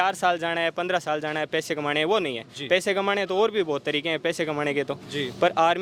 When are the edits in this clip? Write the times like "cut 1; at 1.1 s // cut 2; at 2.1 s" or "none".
none